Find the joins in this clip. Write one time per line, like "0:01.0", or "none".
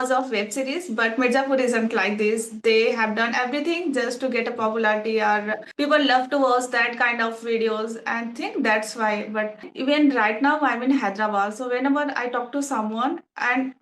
0:05.6
0:09.7